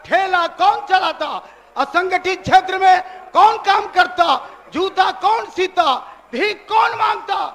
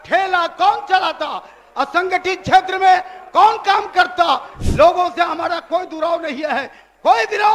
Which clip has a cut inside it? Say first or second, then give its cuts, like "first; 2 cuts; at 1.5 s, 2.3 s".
second; 1 cut; at 4.6 s